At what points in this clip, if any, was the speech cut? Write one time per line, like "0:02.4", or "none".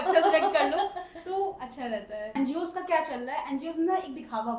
0:02.3